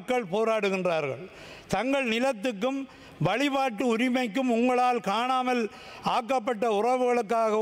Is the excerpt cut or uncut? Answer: uncut